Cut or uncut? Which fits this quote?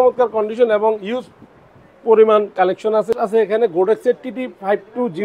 cut